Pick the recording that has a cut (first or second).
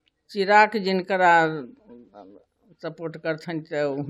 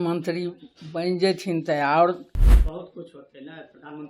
second